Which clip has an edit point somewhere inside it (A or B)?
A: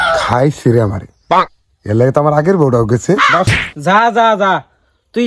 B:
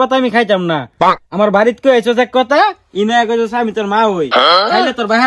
A